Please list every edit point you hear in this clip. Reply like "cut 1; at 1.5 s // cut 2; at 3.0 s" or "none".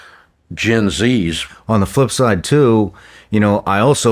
cut 1; at 1.4 s

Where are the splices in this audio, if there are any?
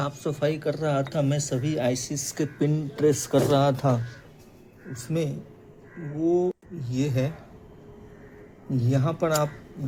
none

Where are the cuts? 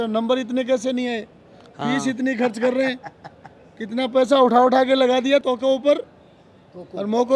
cut 1; at 5.4 s

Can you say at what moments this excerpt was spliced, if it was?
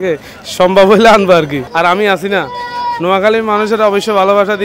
cut 1; at 1.6 s

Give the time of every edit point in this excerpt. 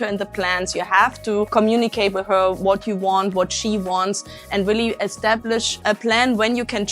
cut 1; at 1.5 s // cut 2; at 5.8 s

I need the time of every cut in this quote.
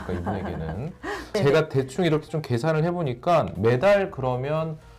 cut 1; at 1.3 s

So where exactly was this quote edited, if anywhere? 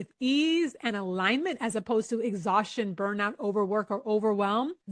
none

